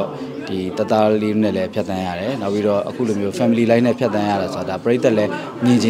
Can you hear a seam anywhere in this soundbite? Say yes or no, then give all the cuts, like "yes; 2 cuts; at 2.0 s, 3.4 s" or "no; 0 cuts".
no; 0 cuts